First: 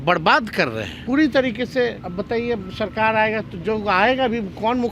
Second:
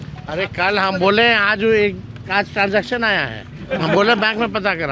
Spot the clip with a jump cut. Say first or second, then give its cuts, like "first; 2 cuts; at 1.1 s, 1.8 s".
first; 2 cuts; at 0.9 s, 2.0 s